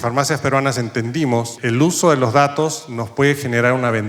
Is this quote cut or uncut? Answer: uncut